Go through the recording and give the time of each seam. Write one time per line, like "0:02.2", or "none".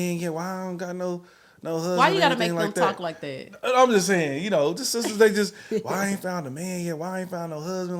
none